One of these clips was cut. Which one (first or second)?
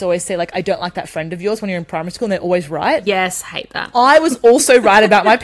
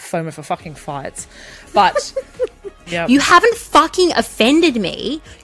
second